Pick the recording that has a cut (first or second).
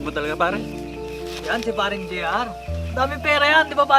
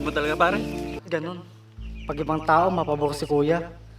second